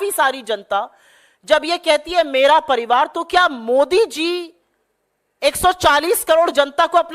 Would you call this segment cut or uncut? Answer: uncut